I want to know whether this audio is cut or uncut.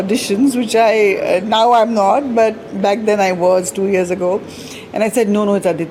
uncut